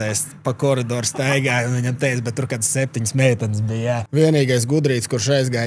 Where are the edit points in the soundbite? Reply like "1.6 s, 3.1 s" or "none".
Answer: 4.0 s